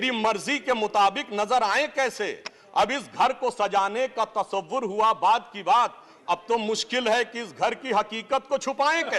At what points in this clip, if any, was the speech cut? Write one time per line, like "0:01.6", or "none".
none